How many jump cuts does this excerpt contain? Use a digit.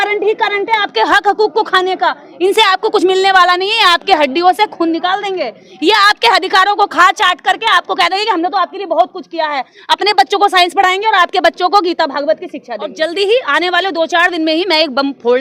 1